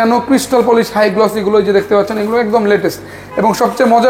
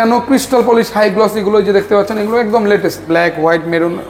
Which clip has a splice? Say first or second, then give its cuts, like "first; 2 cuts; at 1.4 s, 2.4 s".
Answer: second; 1 cut; at 3.0 s